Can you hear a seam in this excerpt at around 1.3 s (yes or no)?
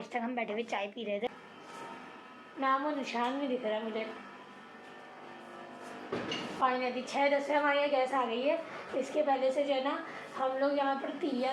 yes